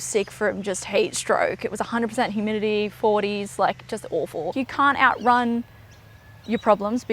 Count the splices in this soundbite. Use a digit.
1